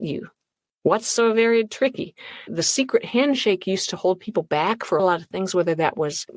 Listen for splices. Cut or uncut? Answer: cut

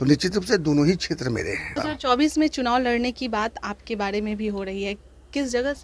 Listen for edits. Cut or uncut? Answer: cut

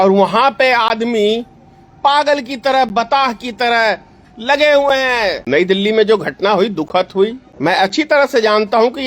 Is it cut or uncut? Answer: cut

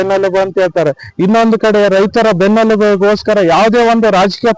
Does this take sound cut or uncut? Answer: uncut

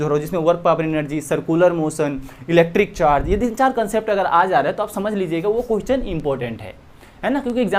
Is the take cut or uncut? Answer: uncut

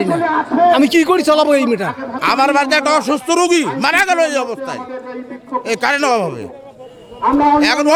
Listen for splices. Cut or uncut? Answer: uncut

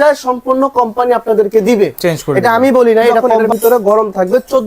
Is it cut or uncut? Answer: cut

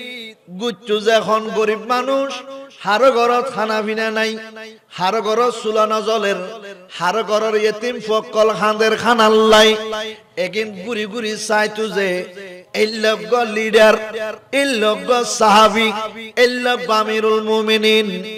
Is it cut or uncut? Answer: uncut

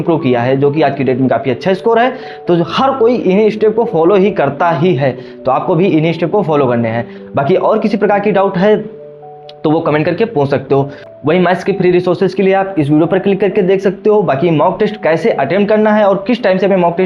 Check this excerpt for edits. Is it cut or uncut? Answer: uncut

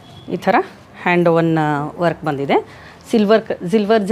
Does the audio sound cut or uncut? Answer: uncut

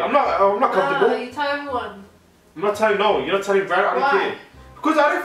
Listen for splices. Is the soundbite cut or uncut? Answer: uncut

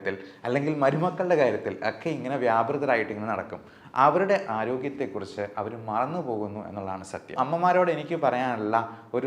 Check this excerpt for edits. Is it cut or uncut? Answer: cut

